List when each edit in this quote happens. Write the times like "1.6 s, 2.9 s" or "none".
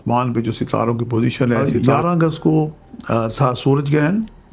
1.7 s